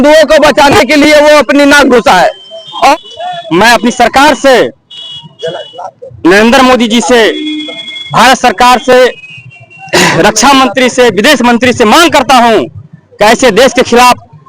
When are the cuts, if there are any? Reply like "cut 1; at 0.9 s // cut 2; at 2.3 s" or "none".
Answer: cut 1; at 2.9 s